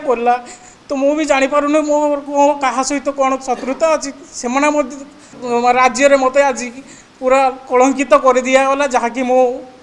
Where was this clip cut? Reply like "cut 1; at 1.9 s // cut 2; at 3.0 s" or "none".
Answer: cut 1; at 5.4 s